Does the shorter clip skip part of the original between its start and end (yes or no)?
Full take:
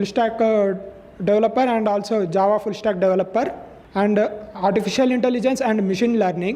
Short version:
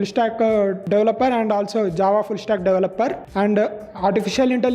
yes